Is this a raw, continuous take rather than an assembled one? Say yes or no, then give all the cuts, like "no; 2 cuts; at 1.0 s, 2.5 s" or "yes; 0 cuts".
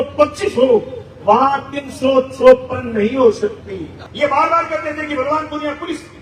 no; 1 cut; at 4.0 s